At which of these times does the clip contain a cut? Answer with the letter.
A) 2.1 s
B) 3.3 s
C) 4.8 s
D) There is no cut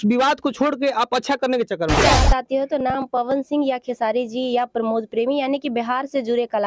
A